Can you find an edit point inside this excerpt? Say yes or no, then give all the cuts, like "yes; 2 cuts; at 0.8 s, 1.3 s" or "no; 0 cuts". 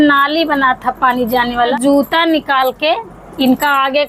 yes; 1 cut; at 1.5 s